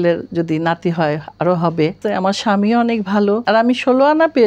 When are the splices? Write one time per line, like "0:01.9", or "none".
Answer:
0:02.0
0:03.4